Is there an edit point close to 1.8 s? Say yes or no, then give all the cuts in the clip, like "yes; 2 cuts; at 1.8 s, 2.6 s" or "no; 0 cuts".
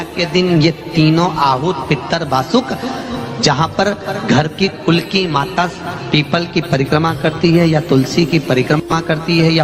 no; 1 cut; at 3.0 s